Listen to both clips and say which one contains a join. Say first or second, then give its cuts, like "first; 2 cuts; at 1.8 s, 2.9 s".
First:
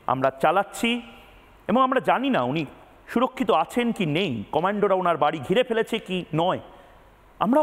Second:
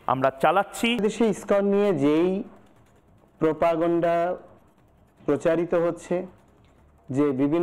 second; 1 cut; at 1.0 s